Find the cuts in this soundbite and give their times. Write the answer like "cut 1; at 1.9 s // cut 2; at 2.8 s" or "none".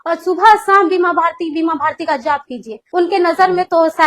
cut 1; at 2.8 s

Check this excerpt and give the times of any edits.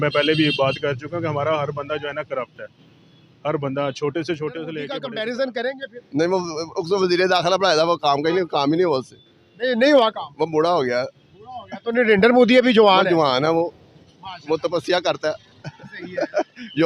cut 1; at 4.9 s

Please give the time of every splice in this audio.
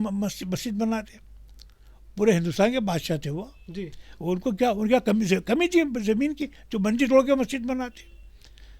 none

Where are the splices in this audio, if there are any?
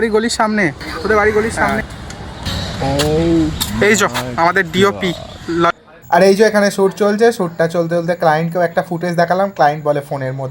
cut 1; at 1.7 s // cut 2; at 5.7 s

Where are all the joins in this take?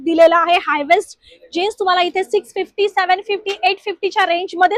none

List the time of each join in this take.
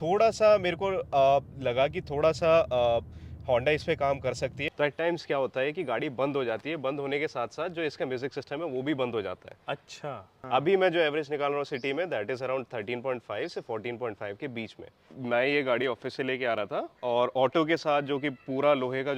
cut 1; at 4.6 s // cut 2; at 10.4 s // cut 3; at 15.1 s

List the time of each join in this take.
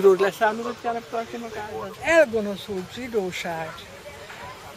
cut 1; at 1.9 s

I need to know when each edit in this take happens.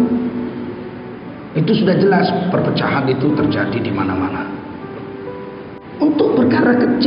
cut 1; at 5.8 s

